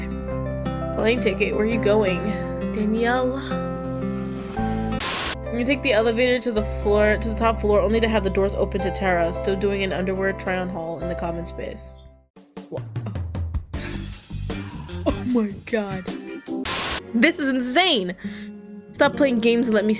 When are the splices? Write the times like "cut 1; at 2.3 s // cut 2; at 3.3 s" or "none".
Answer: cut 1; at 5.0 s // cut 2; at 16.6 s